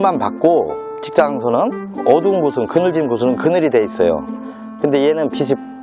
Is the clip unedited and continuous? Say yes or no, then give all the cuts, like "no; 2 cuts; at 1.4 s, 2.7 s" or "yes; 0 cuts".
yes; 0 cuts